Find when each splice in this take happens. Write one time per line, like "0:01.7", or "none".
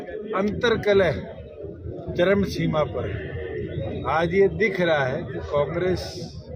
none